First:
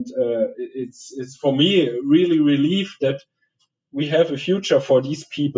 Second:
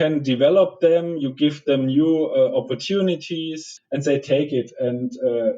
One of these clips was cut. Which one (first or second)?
second